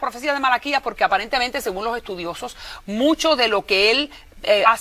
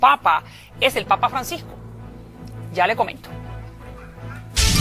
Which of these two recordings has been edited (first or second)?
first